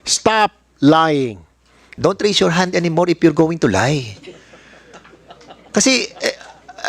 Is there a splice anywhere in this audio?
yes; 1 cut; at 1.9 s

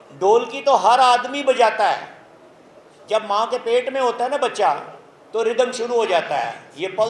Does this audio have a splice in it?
no; 0 cuts

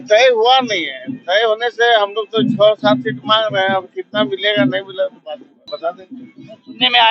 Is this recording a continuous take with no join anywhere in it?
no; 1 cut; at 5.6 s

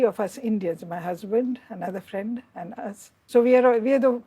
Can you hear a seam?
yes; 1 cut; at 3.1 s

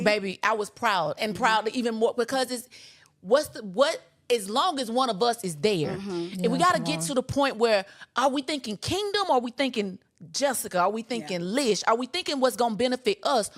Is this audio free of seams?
yes; 0 cuts

